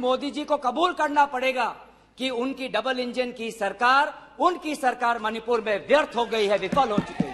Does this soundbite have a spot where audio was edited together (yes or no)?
no